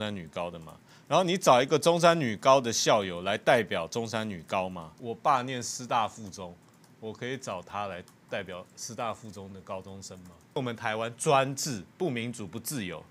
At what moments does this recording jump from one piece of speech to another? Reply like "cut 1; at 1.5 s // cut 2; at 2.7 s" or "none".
cut 1; at 4.9 s // cut 2; at 10.6 s